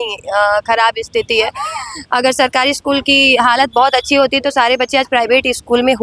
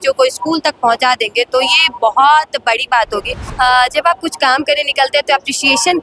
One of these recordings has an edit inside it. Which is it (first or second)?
second